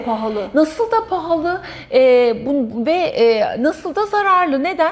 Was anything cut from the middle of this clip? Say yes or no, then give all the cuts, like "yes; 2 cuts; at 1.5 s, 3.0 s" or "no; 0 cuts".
no; 0 cuts